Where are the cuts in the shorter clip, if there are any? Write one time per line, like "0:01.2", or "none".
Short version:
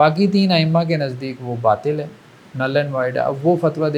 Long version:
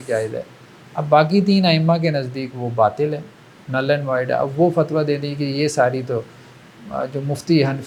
none